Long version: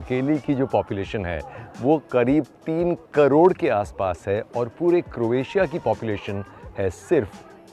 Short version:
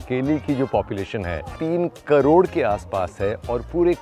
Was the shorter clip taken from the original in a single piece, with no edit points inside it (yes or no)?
no